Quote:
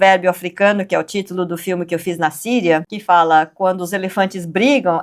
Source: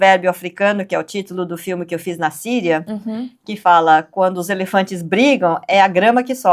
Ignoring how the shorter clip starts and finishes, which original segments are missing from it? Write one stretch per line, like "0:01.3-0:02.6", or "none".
0:02.9-0:03.5

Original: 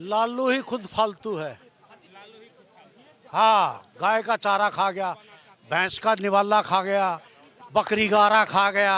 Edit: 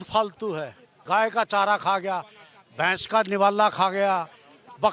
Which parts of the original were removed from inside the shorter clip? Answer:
0:01.8-0:03.9

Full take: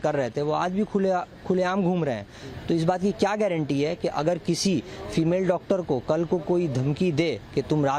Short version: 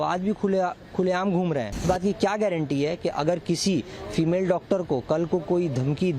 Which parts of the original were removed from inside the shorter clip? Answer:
0:02.3-0:02.8

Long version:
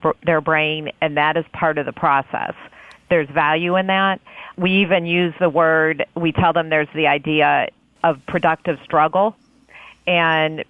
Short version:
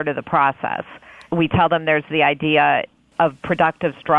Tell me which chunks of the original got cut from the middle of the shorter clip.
0:02.9-0:06.1

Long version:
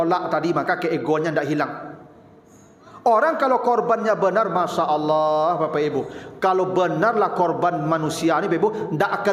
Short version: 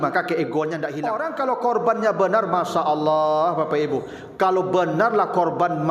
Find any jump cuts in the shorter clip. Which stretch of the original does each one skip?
0:01.6-0:03.1

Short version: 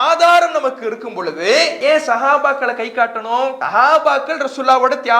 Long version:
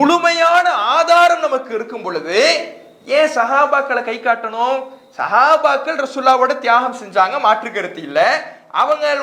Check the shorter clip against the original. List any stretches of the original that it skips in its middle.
0:02.6-0:03.0
0:04.9-0:05.2

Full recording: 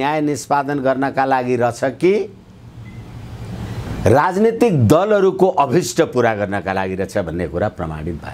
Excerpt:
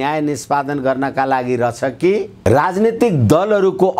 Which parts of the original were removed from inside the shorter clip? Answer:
0:02.3-0:03.9

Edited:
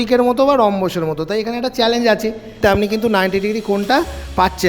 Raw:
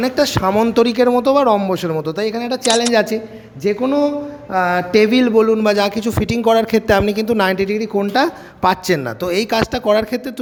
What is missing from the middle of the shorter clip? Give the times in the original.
0:03.5-0:06.8

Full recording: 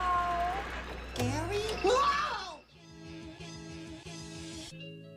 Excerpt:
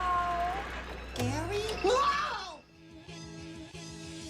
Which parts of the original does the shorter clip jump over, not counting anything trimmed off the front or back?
0:02.8-0:03.1

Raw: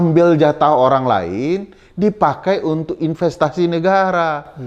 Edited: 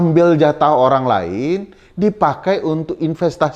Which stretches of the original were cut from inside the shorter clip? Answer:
none

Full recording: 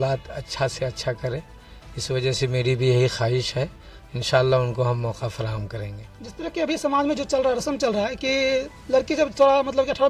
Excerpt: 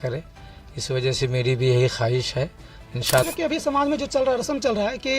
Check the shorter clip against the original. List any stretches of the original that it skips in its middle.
0:04.4-0:06.4

